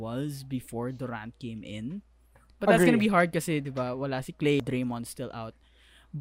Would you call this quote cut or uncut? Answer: cut